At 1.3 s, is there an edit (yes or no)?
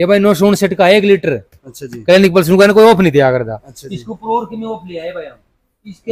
no